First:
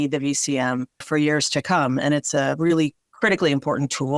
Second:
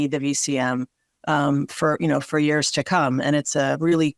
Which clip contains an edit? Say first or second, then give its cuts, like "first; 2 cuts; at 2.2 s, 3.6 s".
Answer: first; 2 cuts; at 1.0 s, 3.0 s